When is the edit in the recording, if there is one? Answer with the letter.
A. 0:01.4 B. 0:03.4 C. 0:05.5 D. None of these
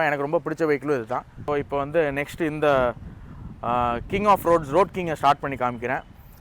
A